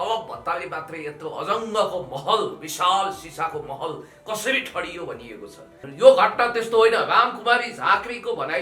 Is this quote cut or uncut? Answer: cut